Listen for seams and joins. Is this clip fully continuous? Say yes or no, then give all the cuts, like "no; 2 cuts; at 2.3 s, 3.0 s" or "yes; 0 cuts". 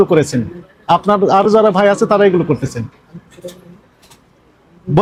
yes; 0 cuts